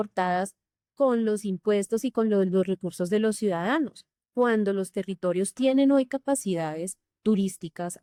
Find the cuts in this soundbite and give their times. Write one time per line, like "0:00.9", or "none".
none